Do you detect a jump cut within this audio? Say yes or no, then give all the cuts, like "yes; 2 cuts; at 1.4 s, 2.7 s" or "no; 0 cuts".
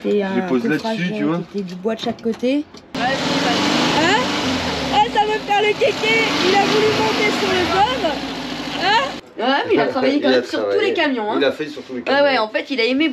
yes; 2 cuts; at 2.8 s, 9.2 s